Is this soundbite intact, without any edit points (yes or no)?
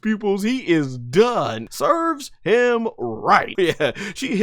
no